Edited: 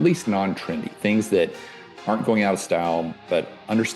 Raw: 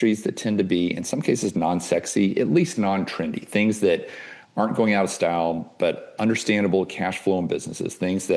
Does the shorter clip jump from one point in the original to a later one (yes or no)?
no